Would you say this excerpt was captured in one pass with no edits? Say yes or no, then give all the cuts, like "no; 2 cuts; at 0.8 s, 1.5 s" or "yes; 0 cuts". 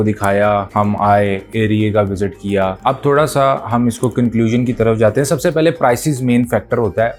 yes; 0 cuts